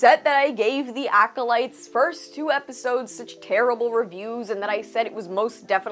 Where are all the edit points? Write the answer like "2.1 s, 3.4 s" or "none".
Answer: none